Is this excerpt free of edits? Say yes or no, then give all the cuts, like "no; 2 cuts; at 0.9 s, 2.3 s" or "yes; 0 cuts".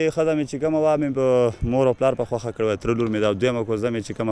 yes; 0 cuts